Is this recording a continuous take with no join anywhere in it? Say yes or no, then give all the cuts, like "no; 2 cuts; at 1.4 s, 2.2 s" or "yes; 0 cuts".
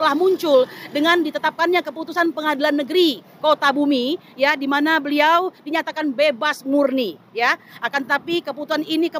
yes; 0 cuts